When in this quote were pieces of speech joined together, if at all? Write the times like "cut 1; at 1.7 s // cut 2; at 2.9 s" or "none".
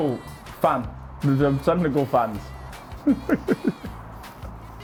none